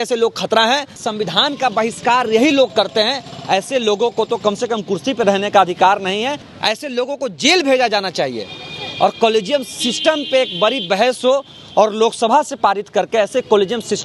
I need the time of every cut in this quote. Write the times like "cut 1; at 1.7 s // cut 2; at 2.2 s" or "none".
cut 1; at 1.0 s // cut 2; at 6.5 s